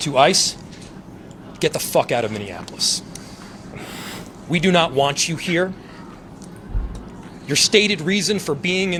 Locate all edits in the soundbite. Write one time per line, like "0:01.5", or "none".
none